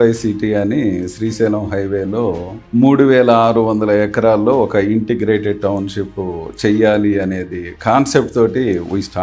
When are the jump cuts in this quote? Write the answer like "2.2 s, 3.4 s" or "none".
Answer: none